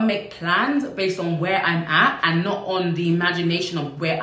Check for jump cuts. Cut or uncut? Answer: cut